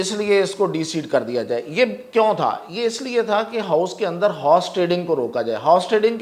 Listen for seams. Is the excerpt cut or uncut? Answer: uncut